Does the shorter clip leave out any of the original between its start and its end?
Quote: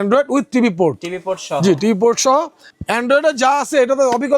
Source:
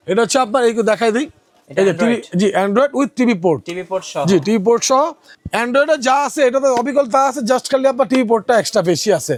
no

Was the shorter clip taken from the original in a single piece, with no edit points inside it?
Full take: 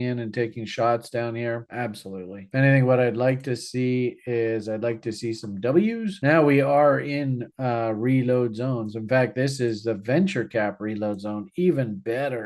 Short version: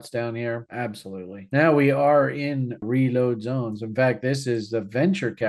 no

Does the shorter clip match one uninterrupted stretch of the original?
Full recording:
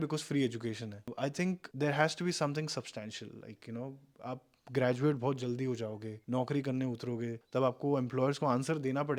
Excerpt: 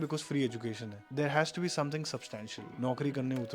no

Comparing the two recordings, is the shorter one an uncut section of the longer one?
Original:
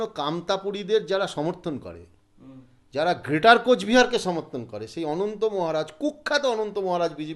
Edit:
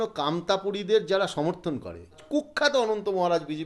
no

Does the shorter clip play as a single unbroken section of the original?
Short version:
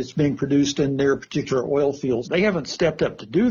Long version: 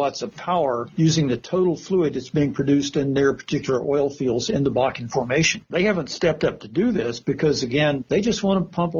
no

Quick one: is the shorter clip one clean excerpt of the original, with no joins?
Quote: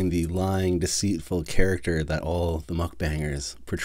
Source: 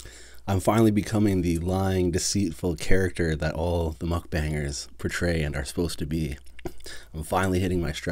yes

